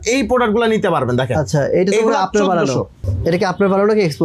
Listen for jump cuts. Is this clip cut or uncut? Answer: cut